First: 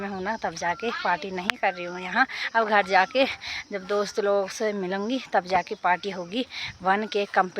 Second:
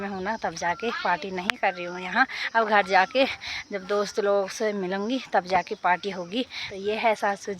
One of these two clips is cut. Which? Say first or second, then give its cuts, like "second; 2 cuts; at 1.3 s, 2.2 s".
second; 1 cut; at 6.6 s